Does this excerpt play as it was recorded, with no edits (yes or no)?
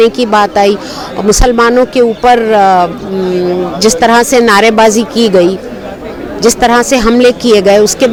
yes